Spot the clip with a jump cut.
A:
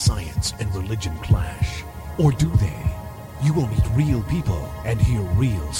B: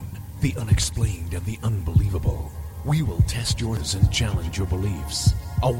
B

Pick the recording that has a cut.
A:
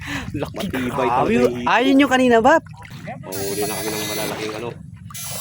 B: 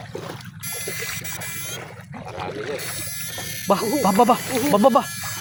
A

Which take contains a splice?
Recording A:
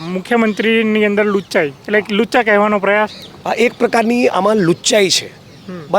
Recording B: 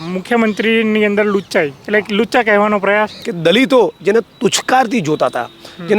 B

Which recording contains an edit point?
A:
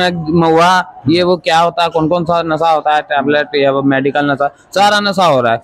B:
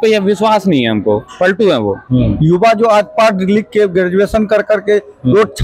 B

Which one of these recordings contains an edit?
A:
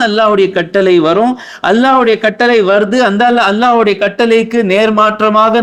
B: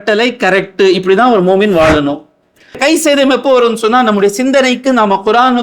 B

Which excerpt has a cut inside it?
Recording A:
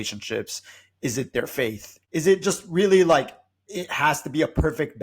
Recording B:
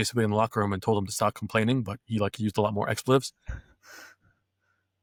A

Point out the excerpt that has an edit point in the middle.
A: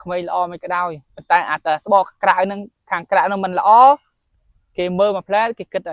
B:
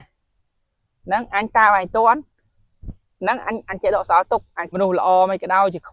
B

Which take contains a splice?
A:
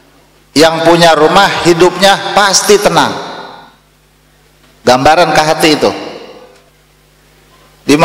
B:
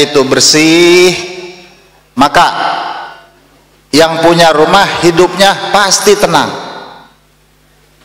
A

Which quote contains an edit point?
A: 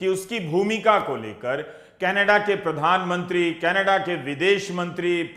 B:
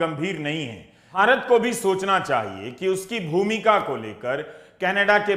B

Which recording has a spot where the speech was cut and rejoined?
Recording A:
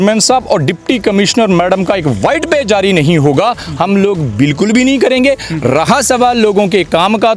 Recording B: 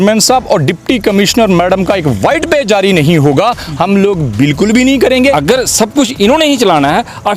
B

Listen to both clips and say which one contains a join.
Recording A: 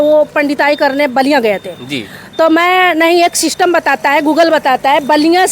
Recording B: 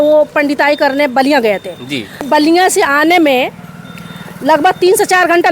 B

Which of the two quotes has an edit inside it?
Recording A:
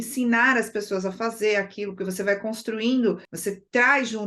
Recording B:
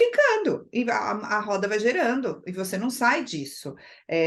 A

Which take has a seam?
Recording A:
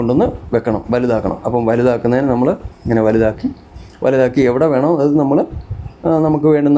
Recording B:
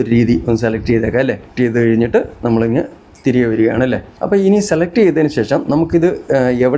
B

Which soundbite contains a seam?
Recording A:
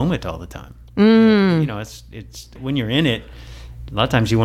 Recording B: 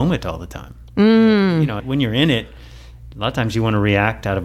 B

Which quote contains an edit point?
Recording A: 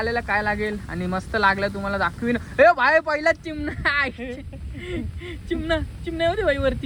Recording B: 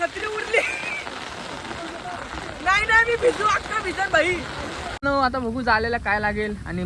B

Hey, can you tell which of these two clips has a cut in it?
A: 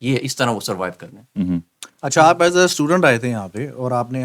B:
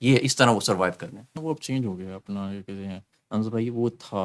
B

